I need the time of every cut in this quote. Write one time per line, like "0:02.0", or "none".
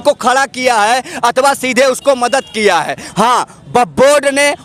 none